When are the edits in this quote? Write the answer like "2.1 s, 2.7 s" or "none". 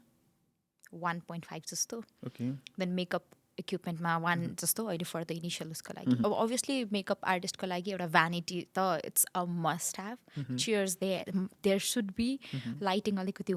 6.2 s